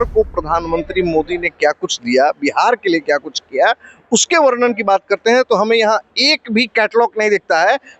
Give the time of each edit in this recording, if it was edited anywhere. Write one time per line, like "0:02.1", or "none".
none